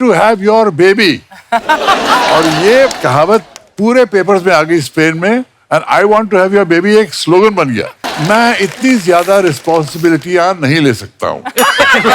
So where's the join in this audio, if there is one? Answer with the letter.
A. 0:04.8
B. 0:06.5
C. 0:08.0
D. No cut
C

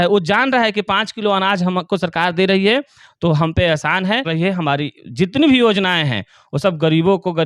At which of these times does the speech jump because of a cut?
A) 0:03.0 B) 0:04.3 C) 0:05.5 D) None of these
B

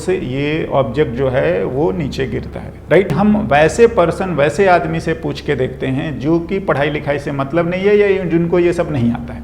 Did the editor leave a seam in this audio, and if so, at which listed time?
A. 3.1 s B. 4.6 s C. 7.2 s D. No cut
A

